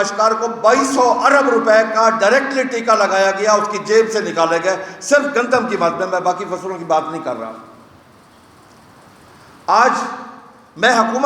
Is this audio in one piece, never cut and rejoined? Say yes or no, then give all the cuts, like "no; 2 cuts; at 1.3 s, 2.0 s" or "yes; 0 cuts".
yes; 0 cuts